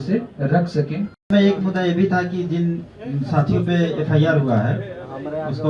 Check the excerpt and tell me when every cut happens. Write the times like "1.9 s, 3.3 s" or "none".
1.3 s